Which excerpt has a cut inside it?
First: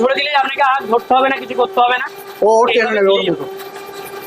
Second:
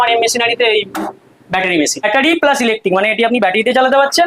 second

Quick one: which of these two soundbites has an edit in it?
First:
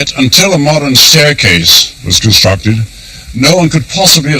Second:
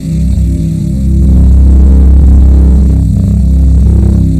first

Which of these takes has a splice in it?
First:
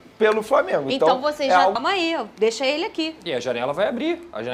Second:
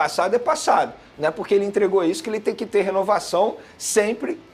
first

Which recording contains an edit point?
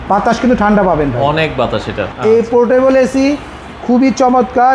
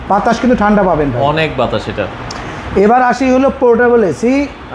first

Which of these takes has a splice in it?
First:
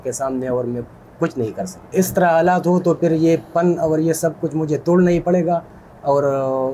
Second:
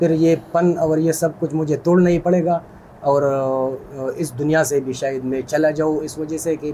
first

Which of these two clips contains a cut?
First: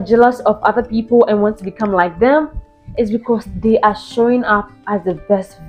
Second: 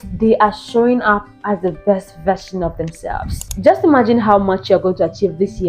second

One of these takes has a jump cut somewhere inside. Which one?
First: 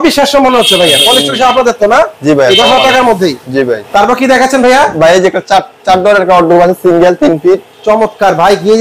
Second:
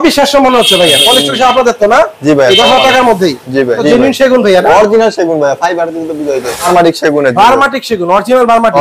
second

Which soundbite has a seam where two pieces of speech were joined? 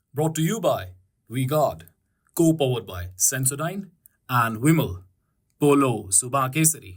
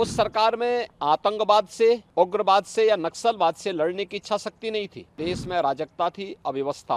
second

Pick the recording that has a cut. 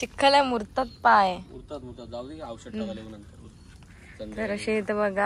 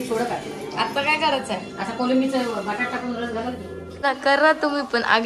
second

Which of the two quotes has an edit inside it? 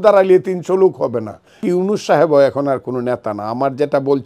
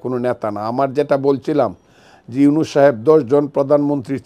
first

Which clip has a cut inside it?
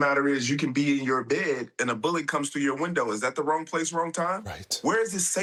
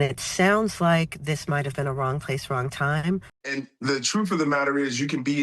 second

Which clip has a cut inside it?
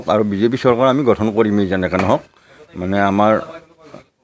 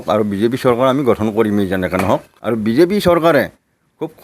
second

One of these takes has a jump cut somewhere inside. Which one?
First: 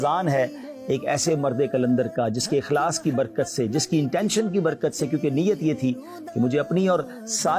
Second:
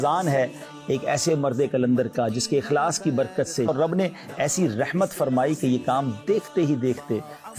second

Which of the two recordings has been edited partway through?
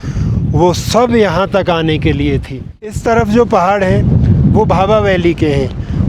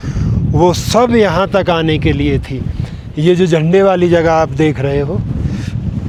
first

